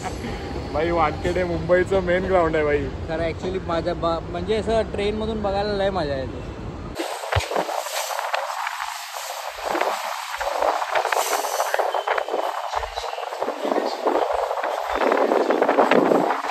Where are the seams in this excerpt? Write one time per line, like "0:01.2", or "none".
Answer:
none